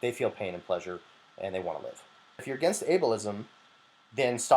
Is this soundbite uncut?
no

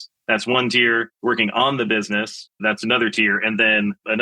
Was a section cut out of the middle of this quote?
no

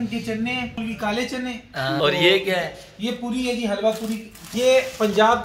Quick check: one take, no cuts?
no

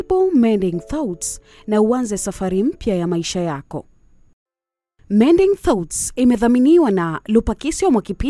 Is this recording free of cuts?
yes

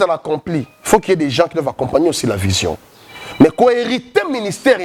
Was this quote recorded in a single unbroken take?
yes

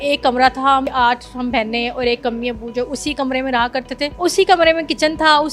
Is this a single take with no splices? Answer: no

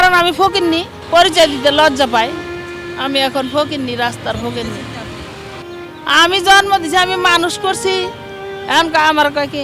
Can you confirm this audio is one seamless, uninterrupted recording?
no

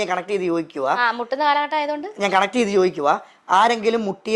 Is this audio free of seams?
no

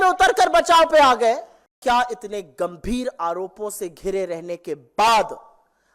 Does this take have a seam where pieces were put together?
yes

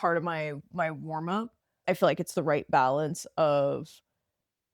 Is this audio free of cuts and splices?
no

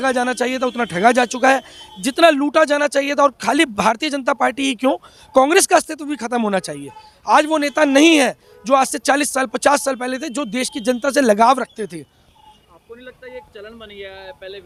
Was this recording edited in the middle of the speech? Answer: no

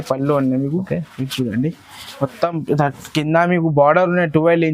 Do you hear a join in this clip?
no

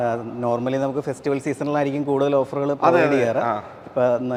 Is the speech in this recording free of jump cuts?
yes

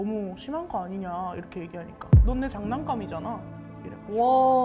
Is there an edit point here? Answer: no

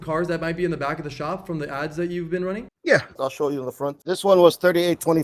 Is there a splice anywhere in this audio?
yes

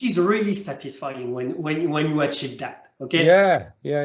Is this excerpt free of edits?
yes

